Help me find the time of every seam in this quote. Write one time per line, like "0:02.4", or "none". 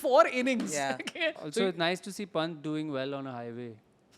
0:01.4